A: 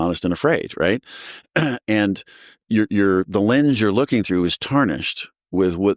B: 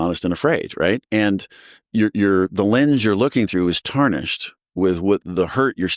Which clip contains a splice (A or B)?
B